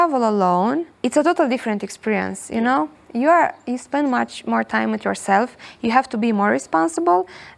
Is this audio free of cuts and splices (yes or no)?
no